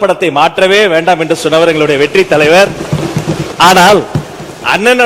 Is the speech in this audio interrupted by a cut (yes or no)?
yes